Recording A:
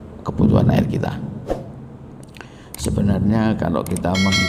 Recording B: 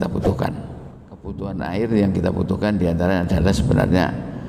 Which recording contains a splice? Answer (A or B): B